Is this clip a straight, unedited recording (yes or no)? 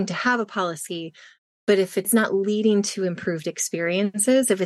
no